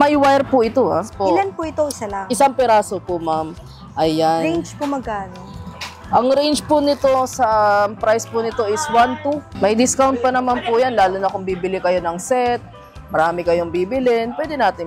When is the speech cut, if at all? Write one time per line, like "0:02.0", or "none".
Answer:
none